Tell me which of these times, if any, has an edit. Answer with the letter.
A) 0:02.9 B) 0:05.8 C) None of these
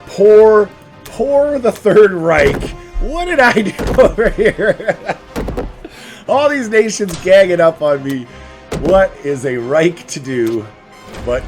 C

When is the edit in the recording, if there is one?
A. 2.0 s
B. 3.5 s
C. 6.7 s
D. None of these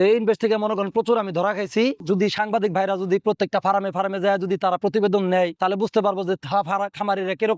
A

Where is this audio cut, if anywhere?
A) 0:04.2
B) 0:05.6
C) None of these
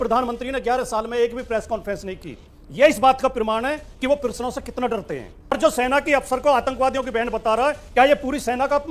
B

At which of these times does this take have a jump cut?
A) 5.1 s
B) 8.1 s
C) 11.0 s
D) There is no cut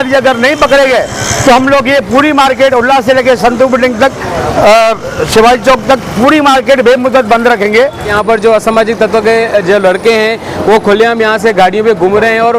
B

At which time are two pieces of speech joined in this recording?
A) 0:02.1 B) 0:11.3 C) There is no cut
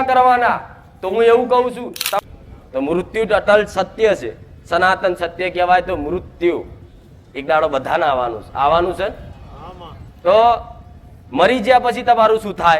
A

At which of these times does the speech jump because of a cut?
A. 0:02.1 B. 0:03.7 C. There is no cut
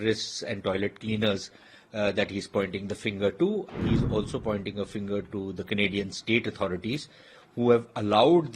B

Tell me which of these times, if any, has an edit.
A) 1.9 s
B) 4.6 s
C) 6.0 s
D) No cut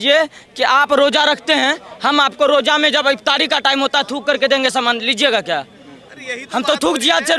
C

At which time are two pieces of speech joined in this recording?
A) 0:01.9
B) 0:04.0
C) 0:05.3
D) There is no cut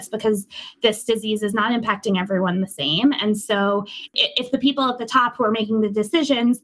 B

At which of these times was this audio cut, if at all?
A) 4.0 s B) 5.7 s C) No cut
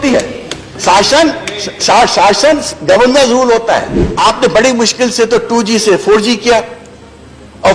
A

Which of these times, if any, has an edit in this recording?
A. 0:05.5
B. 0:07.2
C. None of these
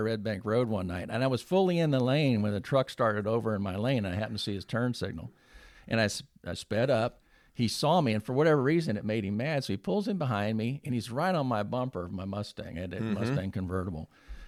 C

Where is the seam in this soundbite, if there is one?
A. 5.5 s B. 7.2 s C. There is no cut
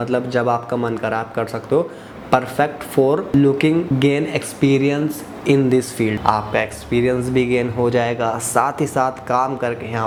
C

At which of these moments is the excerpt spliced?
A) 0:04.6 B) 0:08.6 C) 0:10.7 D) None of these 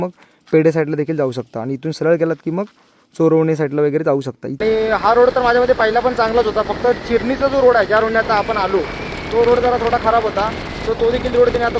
A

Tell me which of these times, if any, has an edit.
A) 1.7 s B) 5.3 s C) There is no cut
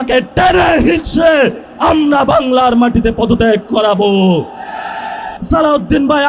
B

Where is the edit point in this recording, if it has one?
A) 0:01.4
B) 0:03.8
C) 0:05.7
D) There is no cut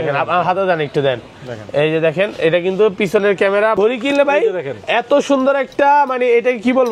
B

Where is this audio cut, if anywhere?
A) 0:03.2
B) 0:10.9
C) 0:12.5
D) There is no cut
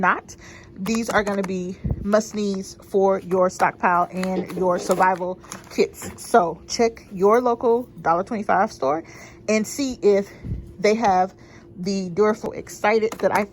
C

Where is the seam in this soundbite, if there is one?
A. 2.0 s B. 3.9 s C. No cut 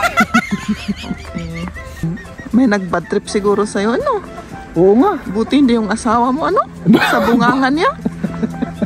A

